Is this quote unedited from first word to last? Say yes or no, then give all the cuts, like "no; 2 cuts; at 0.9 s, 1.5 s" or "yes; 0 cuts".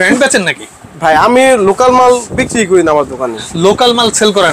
yes; 0 cuts